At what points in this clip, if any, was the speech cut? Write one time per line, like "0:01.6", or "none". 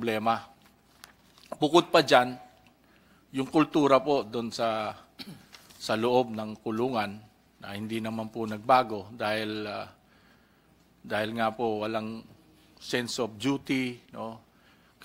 none